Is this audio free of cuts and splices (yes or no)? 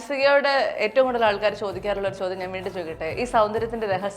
yes